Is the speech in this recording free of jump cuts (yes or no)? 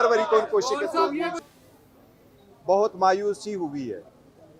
no